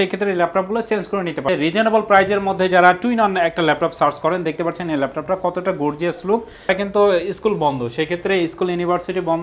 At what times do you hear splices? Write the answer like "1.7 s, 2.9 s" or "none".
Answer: 1.5 s, 6.7 s